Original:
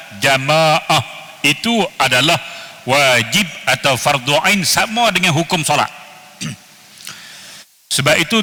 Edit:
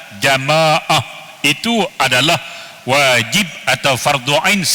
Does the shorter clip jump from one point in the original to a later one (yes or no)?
no